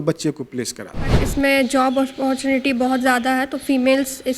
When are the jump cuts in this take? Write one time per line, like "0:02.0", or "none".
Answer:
0:01.2

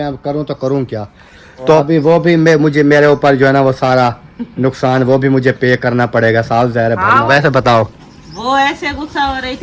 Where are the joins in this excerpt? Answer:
0:01.7
0:07.2

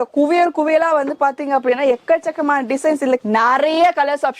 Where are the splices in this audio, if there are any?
0:03.2

